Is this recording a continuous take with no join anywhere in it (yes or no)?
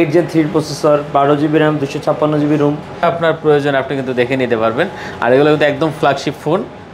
no